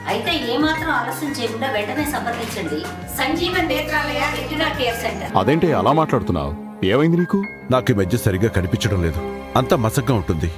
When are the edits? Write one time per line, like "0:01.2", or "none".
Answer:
0:05.2